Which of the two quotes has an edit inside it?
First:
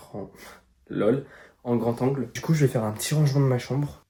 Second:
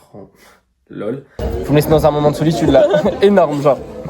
second; 1 cut; at 1.4 s

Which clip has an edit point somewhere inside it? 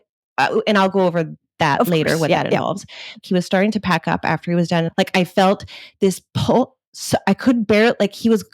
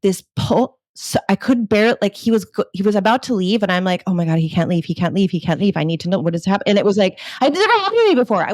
first; 2 cuts; at 3.2 s, 4.9 s

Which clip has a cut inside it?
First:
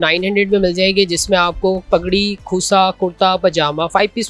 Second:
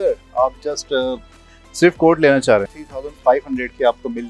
second; 1 cut; at 3.0 s

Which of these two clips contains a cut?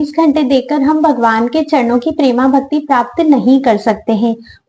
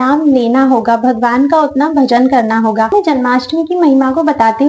second; 1 cut; at 2.9 s

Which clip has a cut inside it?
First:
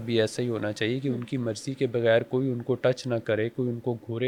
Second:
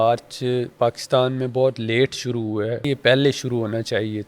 second; 1 cut; at 2.9 s

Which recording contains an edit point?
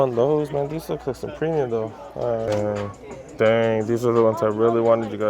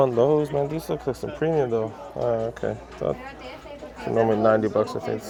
first; 1 cut; at 2.5 s

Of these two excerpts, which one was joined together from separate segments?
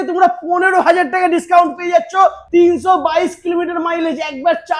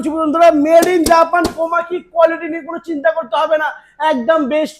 first; 1 cut; at 2.4 s

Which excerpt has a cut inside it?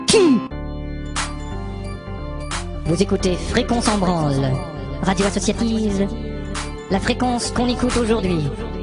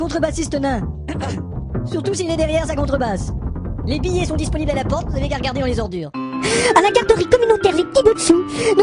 first; 1 cut; at 4.0 s

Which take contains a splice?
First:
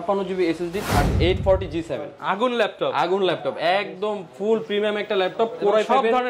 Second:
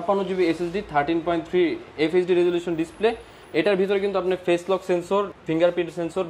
first; 1 cut; at 1.1 s

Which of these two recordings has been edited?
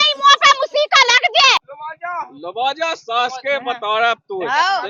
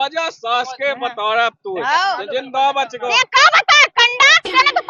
first; 1 cut; at 1.6 s

